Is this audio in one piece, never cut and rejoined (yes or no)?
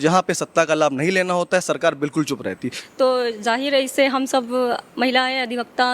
no